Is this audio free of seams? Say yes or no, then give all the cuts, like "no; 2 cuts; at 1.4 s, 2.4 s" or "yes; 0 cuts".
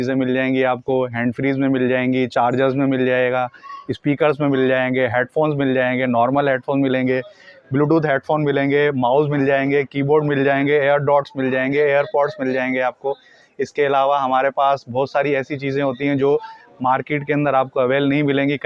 yes; 0 cuts